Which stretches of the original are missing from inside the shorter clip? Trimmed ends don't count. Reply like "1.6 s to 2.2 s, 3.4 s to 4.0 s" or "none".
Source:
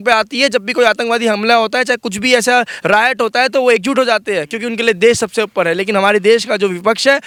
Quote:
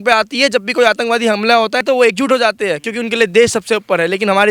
1.8 s to 3.5 s